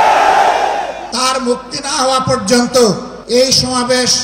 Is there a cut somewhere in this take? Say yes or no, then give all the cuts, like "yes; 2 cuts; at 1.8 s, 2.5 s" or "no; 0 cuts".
yes; 2 cuts; at 1.0 s, 3.1 s